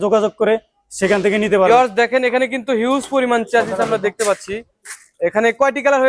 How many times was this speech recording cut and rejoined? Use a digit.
1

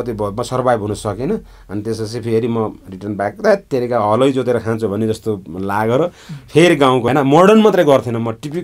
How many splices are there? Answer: 1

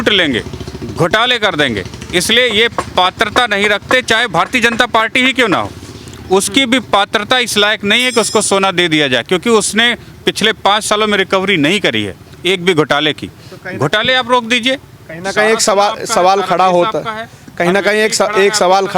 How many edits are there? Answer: 0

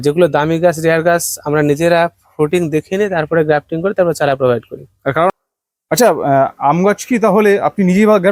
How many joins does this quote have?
1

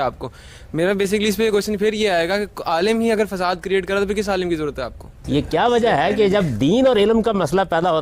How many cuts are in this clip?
1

